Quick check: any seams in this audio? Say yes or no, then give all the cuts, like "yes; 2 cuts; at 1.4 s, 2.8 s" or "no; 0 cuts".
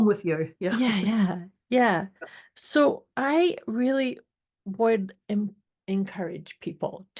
yes; 1 cut; at 5.7 s